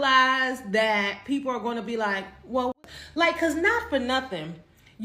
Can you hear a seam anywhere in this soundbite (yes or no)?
yes